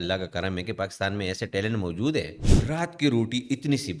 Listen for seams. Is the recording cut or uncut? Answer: cut